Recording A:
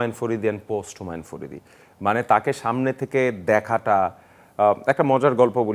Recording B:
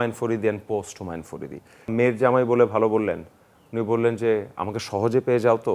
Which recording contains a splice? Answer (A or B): B